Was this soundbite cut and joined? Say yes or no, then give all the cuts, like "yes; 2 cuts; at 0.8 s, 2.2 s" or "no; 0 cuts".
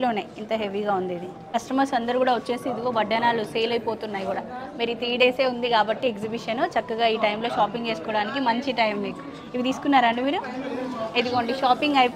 yes; 1 cut; at 1.4 s